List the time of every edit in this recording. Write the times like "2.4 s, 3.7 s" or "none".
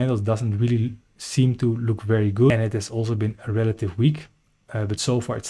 2.5 s